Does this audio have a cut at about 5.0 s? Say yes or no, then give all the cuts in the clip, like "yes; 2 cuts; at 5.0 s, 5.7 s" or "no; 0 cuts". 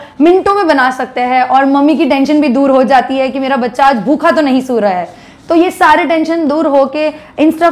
no; 0 cuts